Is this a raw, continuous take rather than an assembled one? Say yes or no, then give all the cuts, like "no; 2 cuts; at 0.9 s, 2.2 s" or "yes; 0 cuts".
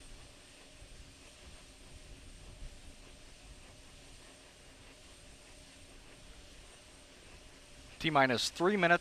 yes; 0 cuts